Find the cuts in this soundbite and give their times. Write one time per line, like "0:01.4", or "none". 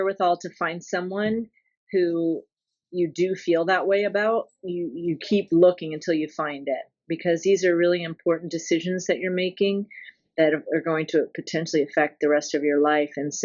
none